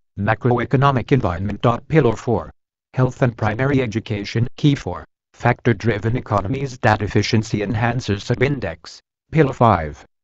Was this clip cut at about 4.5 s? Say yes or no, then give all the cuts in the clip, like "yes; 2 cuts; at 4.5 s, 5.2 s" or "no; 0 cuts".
yes; 2 cuts; at 1.8 s, 4.5 s